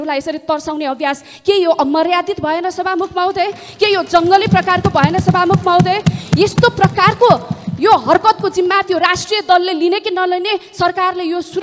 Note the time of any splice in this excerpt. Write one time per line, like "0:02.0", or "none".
none

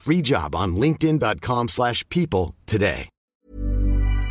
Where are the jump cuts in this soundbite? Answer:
0:03.1

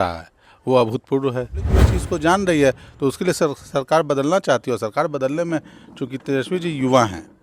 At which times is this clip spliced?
0:01.9

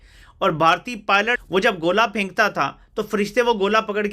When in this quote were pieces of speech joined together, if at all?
0:01.4

